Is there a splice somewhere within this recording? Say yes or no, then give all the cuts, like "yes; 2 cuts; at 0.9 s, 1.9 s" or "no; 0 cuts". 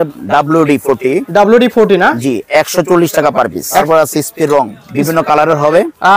yes; 1 cut; at 3.8 s